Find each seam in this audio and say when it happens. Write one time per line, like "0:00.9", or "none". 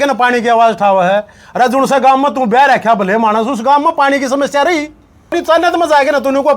0:05.4